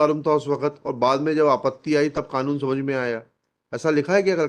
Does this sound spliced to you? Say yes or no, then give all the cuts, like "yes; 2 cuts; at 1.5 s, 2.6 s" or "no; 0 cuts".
no; 0 cuts